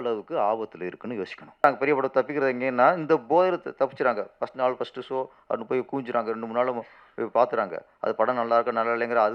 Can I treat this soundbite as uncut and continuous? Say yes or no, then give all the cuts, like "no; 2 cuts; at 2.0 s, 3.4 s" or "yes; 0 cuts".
no; 1 cut; at 1.6 s